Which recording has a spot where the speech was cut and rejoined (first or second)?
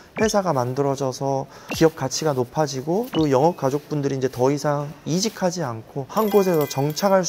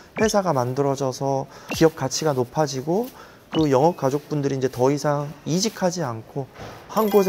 first